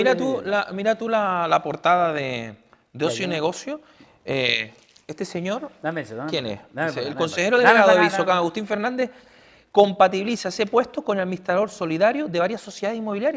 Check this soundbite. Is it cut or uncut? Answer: uncut